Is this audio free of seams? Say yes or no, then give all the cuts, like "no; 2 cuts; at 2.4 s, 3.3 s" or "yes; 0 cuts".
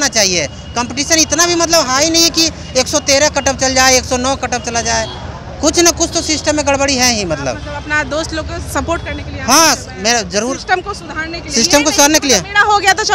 yes; 0 cuts